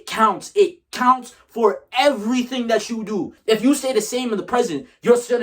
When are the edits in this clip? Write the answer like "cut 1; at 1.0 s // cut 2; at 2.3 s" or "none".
cut 1; at 3.3 s